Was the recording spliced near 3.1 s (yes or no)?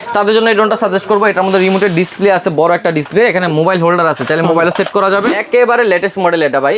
no